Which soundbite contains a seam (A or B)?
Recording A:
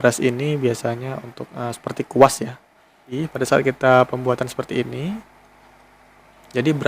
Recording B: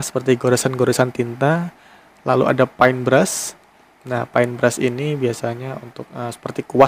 A